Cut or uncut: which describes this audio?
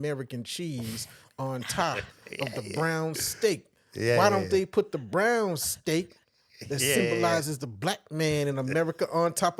uncut